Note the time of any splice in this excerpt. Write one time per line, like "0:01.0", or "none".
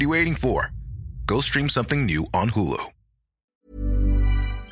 0:03.6